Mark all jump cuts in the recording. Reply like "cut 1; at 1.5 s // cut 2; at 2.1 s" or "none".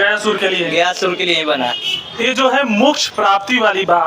cut 1; at 1.8 s